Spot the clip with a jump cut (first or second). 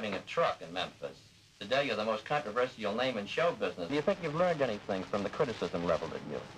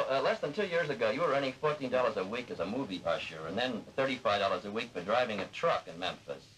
first